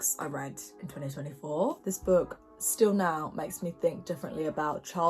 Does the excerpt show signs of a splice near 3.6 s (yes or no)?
no